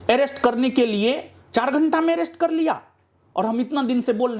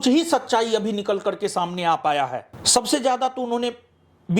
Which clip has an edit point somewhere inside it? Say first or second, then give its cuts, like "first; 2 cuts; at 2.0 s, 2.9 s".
second; 1 cut; at 2.5 s